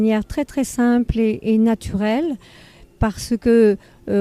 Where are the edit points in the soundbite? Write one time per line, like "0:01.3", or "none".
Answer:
0:01.6